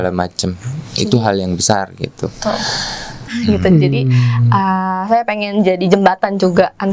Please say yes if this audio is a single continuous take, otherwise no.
no